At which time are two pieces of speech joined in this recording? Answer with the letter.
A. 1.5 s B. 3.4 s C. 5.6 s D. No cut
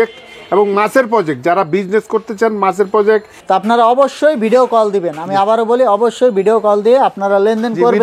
B